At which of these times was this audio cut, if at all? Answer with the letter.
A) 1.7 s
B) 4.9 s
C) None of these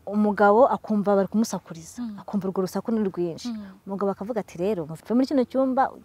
B